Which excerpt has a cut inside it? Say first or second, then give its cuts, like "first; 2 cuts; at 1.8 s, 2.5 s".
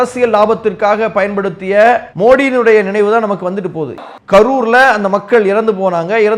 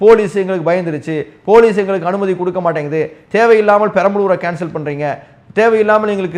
first; 1 cut; at 4.0 s